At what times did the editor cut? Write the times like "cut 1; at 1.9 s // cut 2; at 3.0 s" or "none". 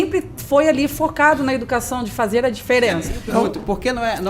cut 1; at 3.1 s